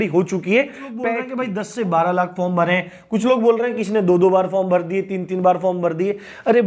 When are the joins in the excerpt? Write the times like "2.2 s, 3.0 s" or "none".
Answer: 1.2 s